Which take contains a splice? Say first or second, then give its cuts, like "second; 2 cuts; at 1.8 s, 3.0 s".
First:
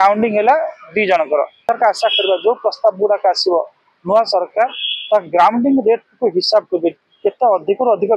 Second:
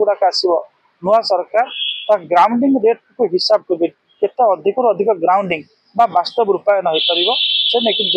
first; 1 cut; at 1.6 s